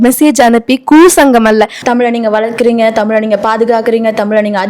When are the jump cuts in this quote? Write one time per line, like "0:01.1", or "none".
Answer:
0:01.8